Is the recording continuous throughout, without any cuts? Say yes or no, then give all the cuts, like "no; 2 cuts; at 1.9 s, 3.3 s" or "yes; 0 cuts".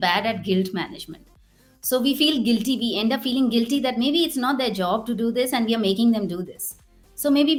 yes; 0 cuts